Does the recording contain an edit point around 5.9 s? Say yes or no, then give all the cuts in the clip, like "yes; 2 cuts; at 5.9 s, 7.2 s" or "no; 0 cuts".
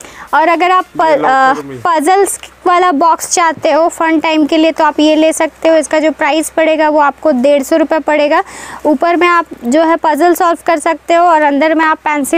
no; 0 cuts